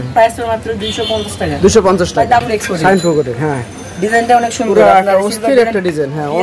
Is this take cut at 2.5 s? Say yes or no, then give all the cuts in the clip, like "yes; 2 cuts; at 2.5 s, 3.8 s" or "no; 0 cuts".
yes; 1 cut; at 2.5 s